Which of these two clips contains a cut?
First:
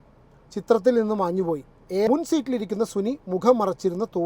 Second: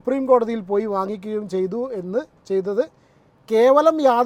first; 1 cut; at 2.1 s

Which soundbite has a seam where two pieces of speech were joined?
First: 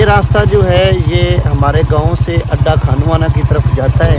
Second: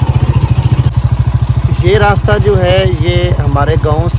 second; 1 cut; at 0.9 s

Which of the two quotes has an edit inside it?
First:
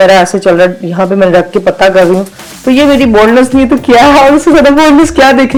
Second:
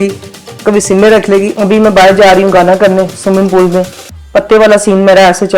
second; 1 cut; at 1.5 s

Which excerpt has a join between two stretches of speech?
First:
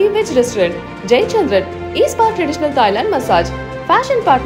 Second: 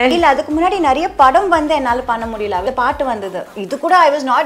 second; 1 cut; at 2.6 s

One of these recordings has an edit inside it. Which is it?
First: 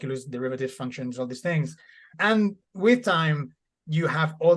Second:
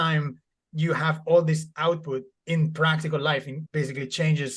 second; 1 cut; at 3.6 s

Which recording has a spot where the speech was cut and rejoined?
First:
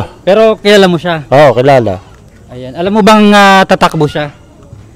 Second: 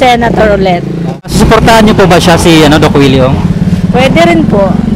second; 1 cut; at 1.2 s

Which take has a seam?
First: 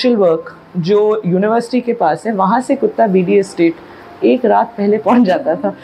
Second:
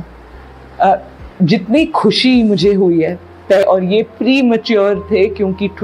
second; 1 cut; at 3.6 s

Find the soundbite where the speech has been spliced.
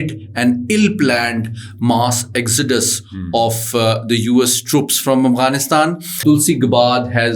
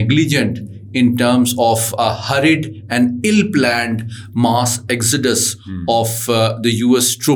first; 1 cut; at 6.2 s

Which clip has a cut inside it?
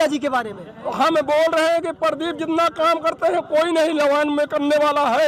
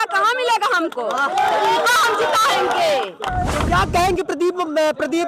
second; 1 cut; at 3.6 s

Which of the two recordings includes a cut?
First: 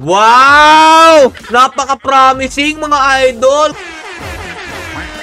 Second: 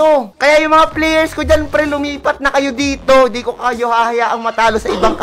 first; 2 cuts; at 1.4 s, 3.7 s

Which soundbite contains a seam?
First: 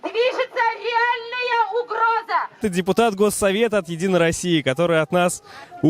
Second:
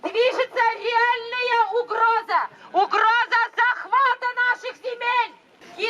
first; 1 cut; at 2.6 s

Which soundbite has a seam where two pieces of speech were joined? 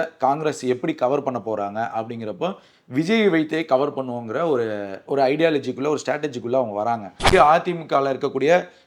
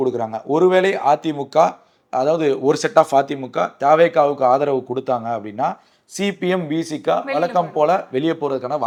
first; 1 cut; at 7.2 s

